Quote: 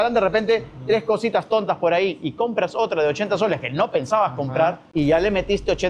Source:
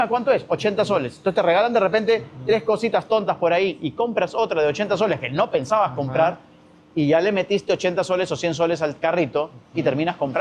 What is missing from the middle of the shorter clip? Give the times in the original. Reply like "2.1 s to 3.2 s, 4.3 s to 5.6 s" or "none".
6.4 s to 6.8 s